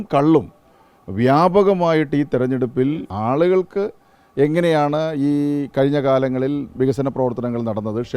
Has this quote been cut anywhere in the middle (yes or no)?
yes